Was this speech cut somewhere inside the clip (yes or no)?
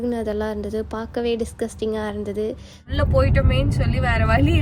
yes